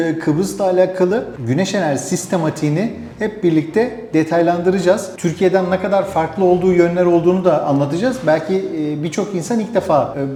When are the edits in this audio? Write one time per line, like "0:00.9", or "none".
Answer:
none